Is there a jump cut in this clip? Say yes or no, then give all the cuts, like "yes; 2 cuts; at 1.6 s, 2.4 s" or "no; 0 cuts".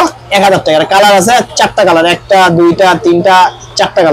no; 0 cuts